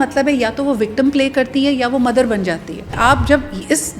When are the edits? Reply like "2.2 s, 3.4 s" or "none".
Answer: 3.0 s